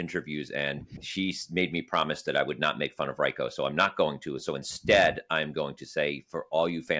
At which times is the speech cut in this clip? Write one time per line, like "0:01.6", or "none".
0:00.9

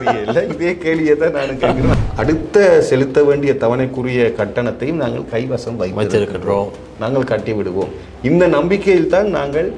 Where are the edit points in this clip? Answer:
0:01.9

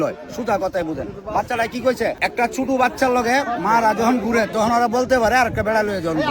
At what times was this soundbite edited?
0:02.2

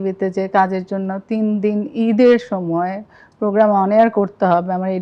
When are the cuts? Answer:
none

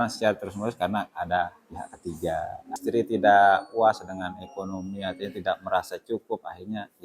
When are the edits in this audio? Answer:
0:02.7

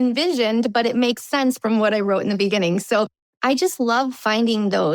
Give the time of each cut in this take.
none

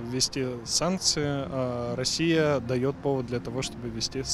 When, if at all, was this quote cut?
none

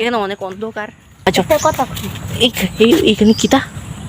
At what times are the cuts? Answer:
0:01.0

